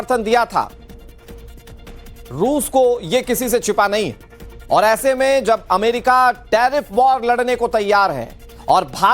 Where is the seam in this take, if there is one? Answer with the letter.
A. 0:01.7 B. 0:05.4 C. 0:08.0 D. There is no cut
B